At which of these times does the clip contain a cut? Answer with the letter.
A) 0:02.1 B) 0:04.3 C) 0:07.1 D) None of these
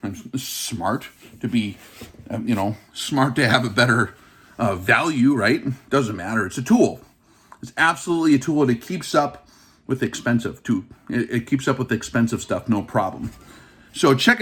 D